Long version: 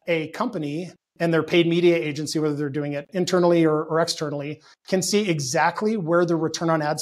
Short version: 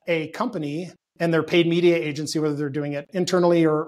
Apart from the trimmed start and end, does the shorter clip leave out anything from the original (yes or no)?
no